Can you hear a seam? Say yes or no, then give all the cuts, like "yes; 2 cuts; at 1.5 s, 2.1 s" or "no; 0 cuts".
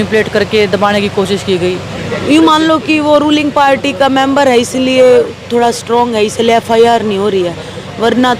yes; 1 cut; at 1.9 s